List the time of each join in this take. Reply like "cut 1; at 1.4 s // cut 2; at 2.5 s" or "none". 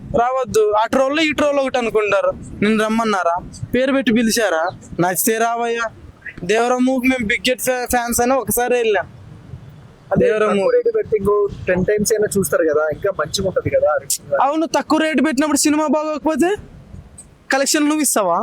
cut 1; at 17.4 s